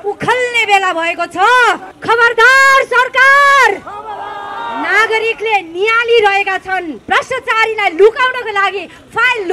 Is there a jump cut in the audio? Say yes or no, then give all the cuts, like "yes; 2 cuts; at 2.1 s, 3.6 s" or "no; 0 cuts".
yes; 2 cuts; at 1.9 s, 6.9 s